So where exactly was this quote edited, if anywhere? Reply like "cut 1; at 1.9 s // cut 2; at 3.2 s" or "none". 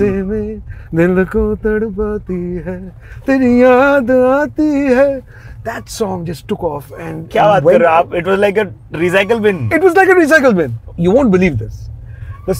cut 1; at 10.8 s